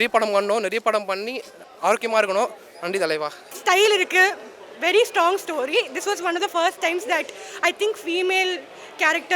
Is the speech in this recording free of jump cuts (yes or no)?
no